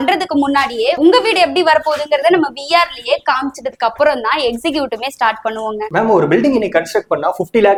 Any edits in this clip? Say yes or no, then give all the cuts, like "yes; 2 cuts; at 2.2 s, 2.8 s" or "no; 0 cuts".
no; 0 cuts